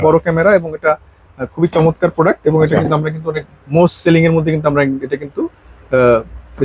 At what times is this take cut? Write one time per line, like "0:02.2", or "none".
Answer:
none